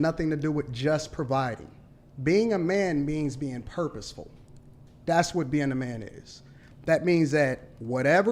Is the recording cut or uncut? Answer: uncut